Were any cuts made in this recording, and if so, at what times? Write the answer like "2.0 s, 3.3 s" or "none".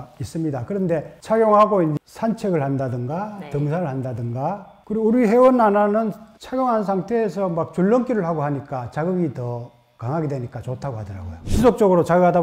11.4 s